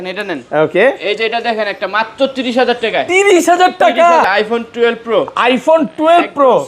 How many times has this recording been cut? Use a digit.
1